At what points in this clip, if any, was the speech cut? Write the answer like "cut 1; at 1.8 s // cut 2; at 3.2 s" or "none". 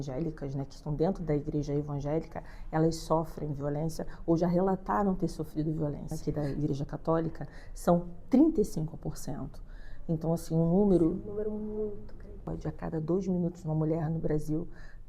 cut 1; at 6.1 s // cut 2; at 12.5 s